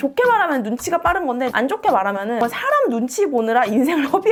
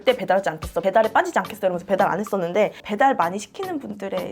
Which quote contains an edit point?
second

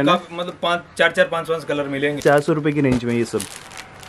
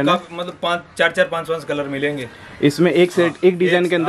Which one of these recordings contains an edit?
first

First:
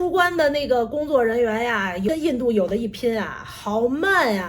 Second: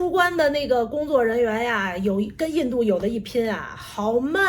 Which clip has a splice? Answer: first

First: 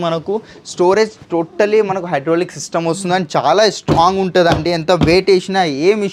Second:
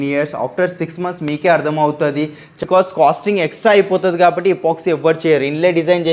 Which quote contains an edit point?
second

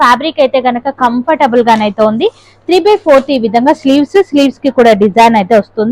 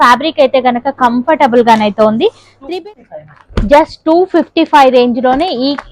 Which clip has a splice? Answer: second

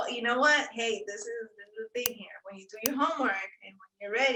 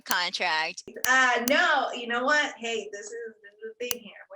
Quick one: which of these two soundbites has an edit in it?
second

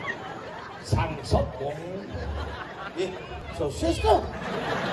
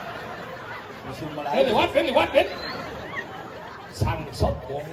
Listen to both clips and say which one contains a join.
first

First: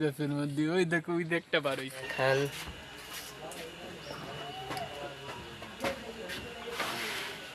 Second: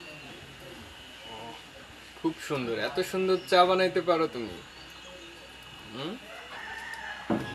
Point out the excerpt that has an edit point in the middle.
first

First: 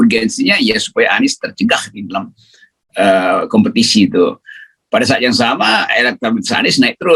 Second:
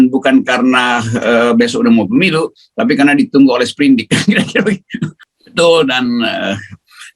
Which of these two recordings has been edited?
second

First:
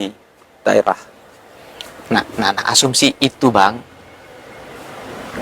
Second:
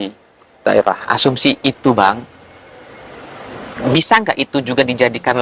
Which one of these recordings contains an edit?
second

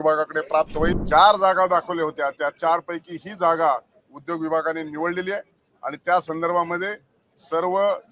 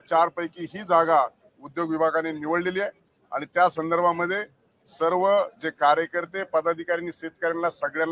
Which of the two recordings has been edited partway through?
first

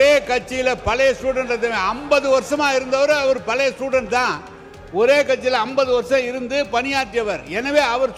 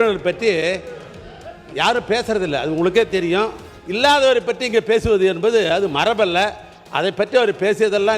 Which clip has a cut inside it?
second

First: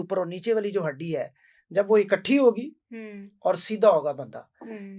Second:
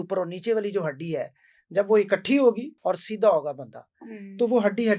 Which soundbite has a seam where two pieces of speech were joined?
second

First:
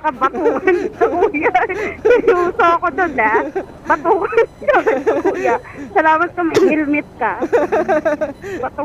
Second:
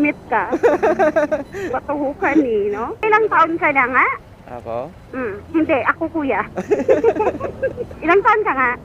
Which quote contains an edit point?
second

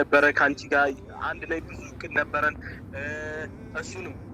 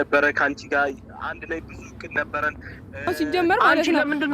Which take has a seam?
second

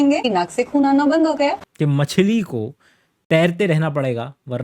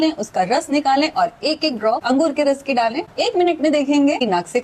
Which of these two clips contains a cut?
first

